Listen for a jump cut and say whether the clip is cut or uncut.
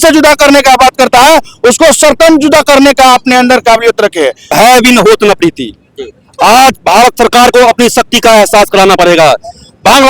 cut